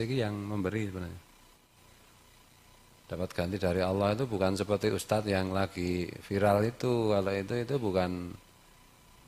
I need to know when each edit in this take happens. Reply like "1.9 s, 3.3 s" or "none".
1.7 s